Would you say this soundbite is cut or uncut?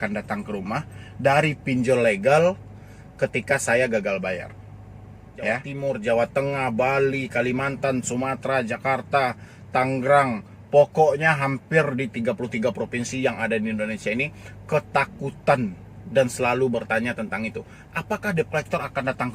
cut